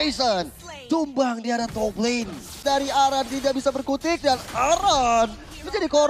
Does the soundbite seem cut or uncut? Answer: cut